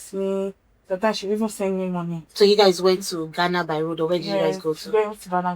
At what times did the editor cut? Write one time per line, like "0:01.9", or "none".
0:02.2

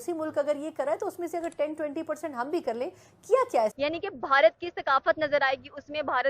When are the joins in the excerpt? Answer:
0:03.7

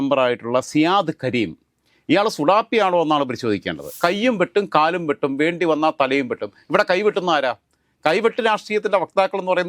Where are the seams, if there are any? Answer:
0:03.9

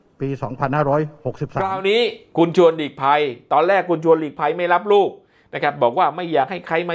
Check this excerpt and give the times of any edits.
0:01.7

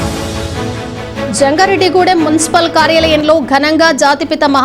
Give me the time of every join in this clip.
0:01.3

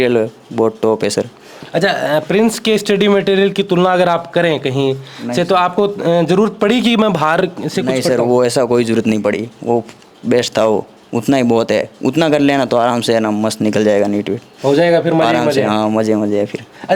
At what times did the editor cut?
none

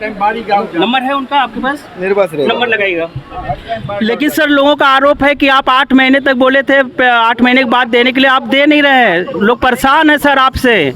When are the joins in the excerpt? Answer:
0:03.8

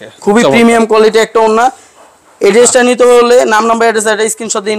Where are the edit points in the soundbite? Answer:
none

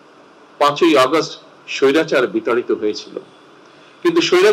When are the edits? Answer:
none

